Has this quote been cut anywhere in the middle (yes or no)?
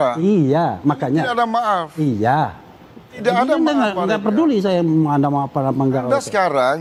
no